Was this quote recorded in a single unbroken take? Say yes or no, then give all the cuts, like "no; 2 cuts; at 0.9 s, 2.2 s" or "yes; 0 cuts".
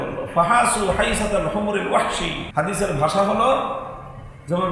no; 1 cut; at 2.4 s